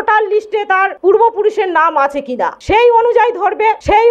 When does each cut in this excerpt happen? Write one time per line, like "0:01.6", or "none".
none